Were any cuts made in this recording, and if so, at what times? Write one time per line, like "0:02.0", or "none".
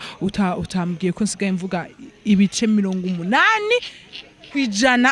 none

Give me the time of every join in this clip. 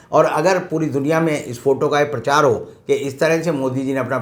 none

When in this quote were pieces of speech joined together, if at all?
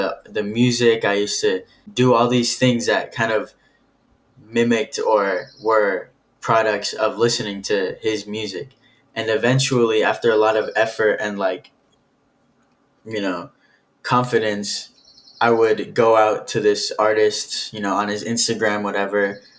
0:01.8

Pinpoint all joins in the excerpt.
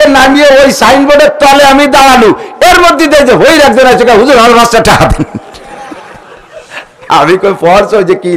none

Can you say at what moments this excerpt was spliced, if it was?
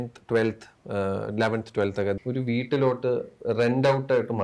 0:02.2

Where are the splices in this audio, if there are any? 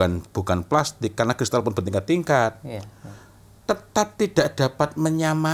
none

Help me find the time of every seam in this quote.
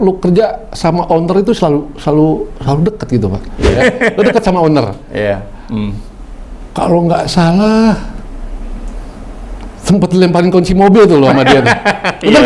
0:03.7

